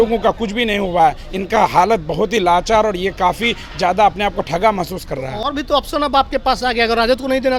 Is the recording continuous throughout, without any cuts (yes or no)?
yes